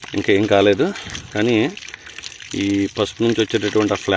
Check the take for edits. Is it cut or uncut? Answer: uncut